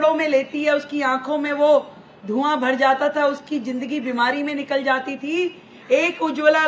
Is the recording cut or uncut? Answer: uncut